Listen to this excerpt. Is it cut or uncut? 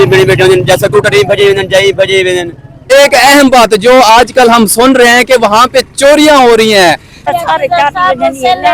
cut